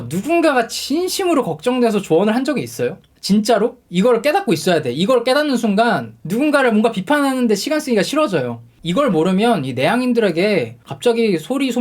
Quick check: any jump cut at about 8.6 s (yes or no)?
yes